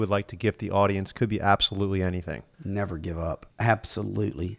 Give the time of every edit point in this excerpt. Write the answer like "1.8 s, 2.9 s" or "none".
2.5 s, 3.5 s